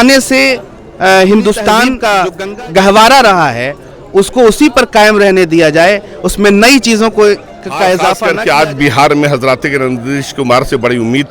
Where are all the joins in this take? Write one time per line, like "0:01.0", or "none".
0:02.0
0:08.2